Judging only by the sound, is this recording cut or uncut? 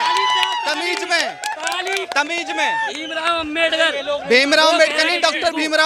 uncut